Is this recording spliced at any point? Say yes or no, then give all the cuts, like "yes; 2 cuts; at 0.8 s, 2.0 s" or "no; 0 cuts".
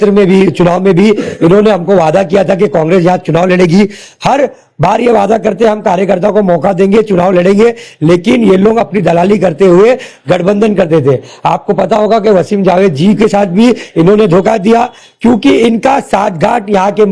no; 0 cuts